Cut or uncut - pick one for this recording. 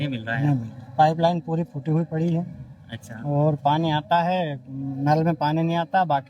cut